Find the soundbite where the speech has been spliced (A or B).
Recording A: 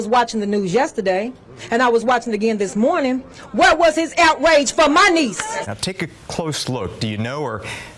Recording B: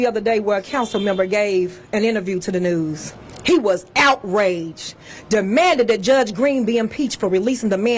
A